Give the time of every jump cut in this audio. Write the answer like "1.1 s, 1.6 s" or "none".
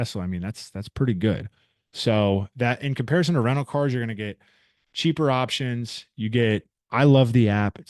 none